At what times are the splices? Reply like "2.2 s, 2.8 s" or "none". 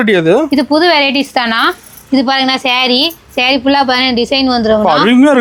none